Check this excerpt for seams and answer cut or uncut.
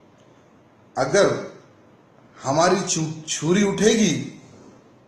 uncut